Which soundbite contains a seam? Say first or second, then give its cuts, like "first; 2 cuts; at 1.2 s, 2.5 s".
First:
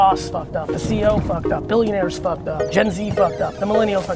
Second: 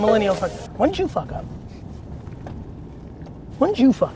first; 1 cut; at 2.6 s